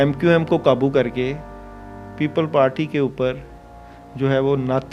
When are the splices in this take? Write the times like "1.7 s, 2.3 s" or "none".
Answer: none

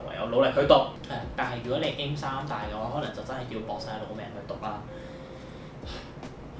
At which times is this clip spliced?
1.0 s

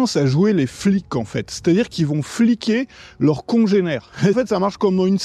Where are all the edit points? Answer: 4.4 s

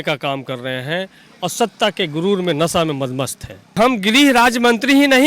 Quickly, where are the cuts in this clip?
3.8 s

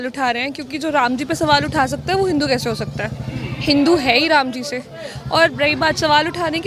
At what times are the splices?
none

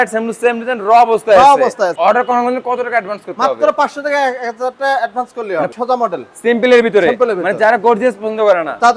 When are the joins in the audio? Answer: 1.9 s, 5.7 s

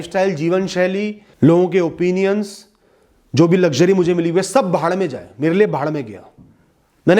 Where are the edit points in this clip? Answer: 1.2 s

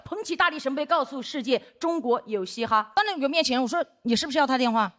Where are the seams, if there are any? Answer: 3.0 s

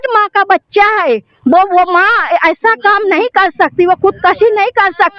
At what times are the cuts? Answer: none

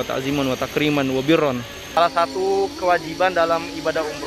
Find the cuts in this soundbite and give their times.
2.0 s

